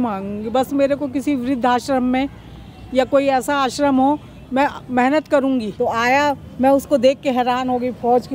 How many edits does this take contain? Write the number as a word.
one